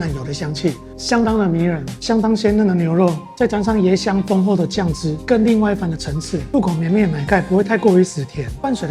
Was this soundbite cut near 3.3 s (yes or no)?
no